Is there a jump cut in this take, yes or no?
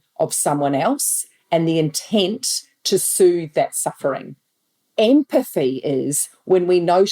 yes